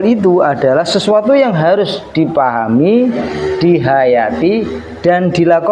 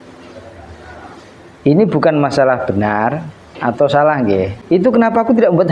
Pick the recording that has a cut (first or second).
second